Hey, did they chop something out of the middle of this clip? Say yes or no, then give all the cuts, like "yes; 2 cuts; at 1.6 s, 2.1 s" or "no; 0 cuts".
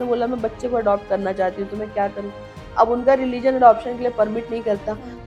no; 0 cuts